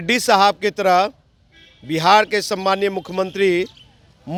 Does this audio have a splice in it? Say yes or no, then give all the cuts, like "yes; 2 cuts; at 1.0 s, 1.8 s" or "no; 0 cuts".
no; 0 cuts